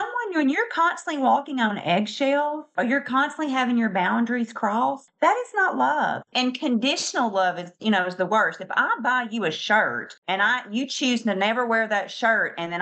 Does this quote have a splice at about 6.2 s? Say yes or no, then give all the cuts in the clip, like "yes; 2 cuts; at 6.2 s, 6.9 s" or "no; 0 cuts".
yes; 3 cuts; at 2.7 s, 6.2 s, 10.1 s